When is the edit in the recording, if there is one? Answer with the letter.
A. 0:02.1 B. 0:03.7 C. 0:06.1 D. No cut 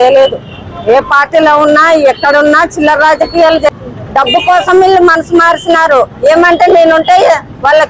B